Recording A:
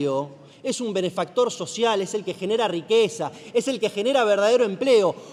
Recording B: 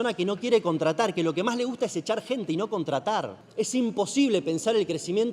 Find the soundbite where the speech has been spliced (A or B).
B